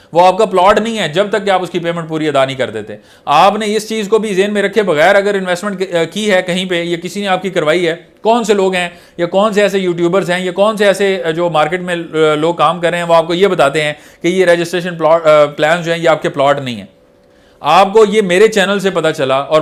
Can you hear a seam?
no; 0 cuts

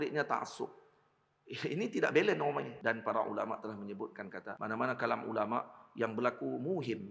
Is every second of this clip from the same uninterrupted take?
no; 2 cuts; at 2.7 s, 4.5 s

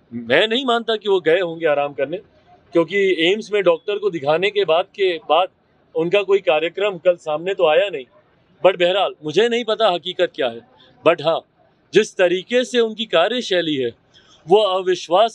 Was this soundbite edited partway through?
no; 0 cuts

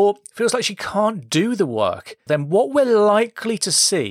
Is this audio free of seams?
no; 1 cut; at 2.3 s

